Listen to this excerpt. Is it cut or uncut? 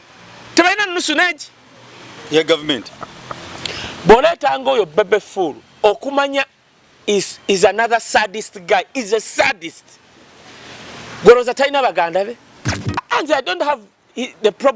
cut